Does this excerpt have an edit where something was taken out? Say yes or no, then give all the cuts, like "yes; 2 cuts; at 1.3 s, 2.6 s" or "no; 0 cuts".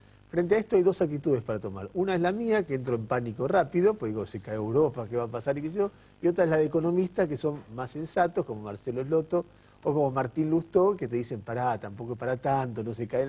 yes; 1 cut; at 5.7 s